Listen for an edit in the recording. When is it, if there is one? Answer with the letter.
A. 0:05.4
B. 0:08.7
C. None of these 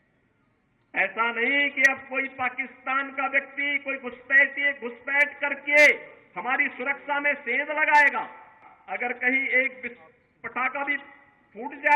B